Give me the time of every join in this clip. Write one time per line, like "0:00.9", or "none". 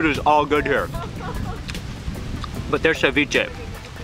none